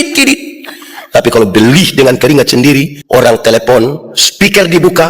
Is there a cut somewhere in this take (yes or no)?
yes